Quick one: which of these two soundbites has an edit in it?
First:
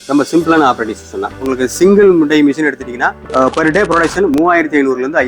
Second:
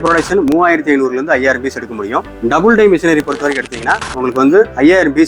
first; 1 cut; at 1.4 s

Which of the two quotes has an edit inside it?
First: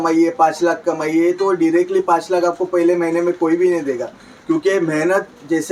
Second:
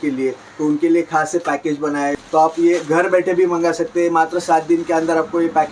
second; 1 cut; at 2.2 s

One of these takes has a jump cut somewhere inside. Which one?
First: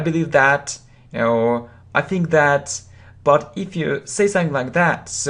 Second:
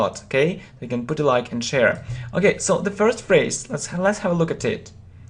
second; 1 cut; at 1.0 s

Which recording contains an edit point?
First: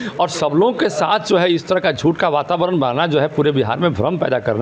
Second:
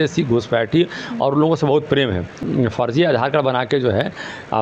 second; 1 cut; at 2.4 s

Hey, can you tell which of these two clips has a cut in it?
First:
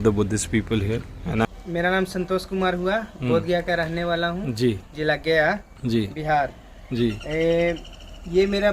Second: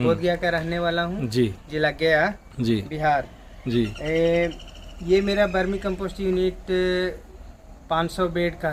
first; 1 cut; at 1.5 s

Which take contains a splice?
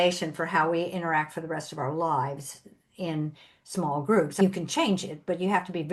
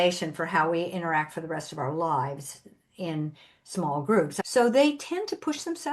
second; 1 cut; at 4.3 s

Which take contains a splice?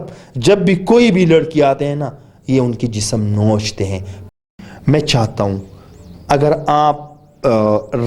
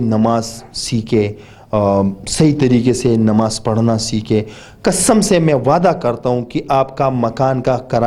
first; 1 cut; at 4.3 s

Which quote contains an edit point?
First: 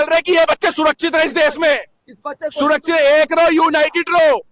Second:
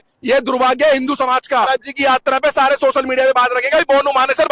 second; 1 cut; at 1.7 s

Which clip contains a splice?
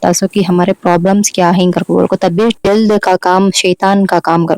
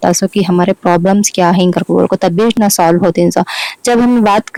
first; 1 cut; at 2.6 s

